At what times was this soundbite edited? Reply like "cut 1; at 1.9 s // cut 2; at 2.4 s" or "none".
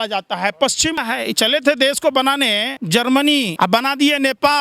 cut 1; at 1.0 s // cut 2; at 2.7 s // cut 3; at 3.5 s